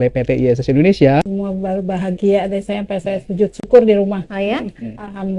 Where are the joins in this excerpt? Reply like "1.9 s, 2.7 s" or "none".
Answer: 1.2 s